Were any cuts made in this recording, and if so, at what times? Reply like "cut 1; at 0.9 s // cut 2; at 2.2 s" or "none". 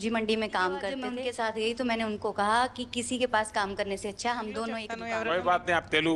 cut 1; at 1.1 s // cut 2; at 4.9 s